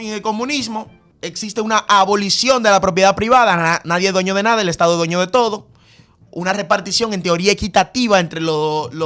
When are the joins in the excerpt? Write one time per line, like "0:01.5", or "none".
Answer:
0:01.0